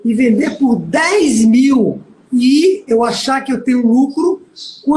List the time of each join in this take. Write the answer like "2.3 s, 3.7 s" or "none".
2.9 s